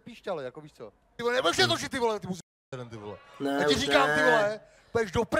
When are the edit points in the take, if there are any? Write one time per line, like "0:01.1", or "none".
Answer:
0:01.2

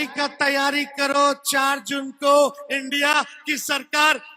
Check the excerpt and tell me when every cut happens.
none

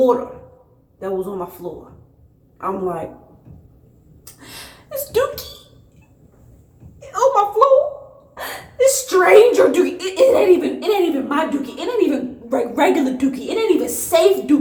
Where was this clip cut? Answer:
none

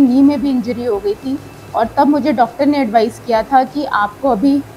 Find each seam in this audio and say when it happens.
none

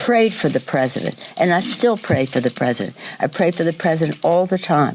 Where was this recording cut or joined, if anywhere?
0:01.2

